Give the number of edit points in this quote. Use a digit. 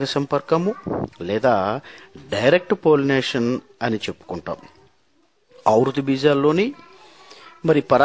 1